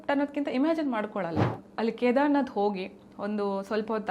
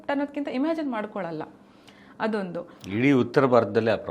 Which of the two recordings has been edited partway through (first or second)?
first